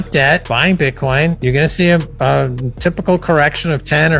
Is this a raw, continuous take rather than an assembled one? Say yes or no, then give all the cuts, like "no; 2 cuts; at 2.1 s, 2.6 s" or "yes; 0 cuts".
yes; 0 cuts